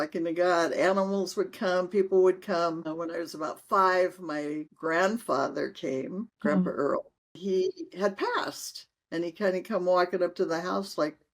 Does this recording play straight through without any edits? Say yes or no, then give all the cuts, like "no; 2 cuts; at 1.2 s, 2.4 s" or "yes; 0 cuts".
no; 1 cut; at 7.4 s